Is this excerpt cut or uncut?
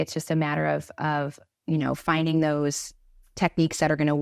uncut